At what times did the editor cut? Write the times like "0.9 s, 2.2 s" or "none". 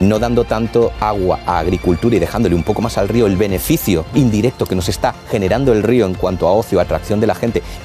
1.0 s, 4.1 s